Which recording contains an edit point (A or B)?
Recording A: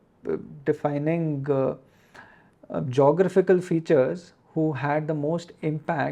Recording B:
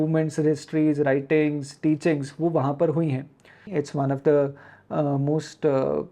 B